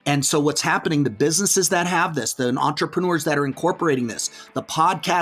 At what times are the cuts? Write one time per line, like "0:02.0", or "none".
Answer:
none